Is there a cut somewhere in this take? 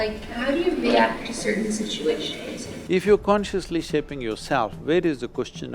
yes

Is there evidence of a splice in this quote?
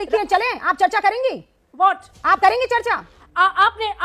no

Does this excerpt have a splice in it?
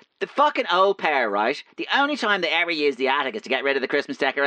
no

